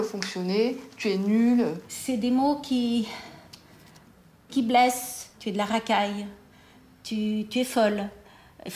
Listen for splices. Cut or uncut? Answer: cut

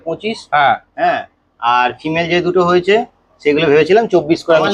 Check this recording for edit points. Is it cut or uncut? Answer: uncut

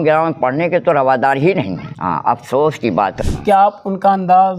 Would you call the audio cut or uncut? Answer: cut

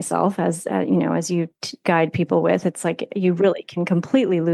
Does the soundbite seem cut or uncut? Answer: uncut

